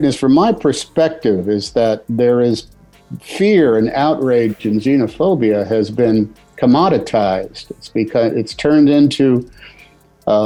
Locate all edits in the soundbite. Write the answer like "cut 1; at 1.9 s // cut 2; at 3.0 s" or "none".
none